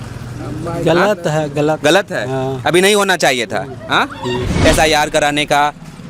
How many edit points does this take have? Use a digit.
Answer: 1